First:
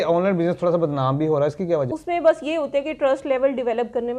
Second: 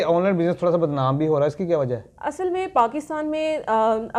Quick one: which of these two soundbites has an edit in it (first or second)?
first